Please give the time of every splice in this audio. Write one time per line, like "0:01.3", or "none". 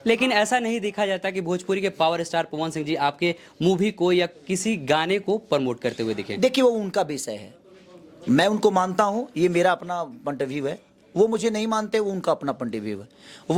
none

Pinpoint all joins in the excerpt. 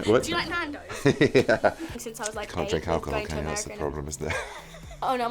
0:02.0

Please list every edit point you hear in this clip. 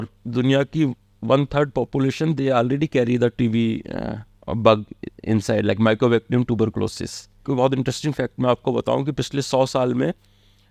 0:07.4

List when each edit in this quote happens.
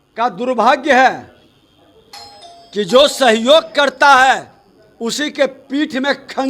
none

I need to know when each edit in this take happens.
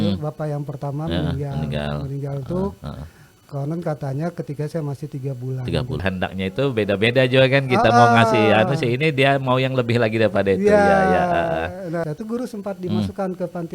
0:06.0
0:12.0

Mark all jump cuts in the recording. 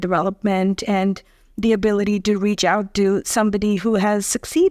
none

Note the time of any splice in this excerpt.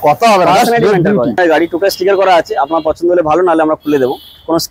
0:01.4

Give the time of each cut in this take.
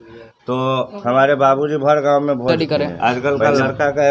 0:02.5

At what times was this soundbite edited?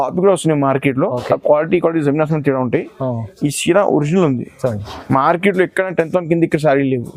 none

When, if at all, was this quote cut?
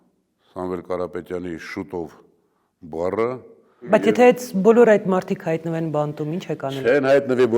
0:03.9

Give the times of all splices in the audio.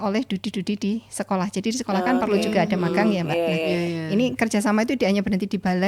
none

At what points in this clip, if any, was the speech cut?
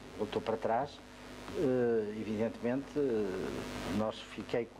none

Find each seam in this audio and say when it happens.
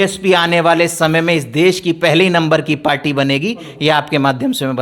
none

